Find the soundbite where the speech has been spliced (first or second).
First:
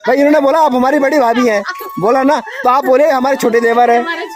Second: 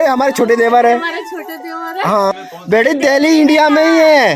second